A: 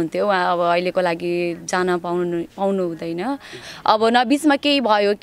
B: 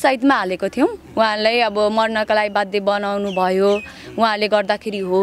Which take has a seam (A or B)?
A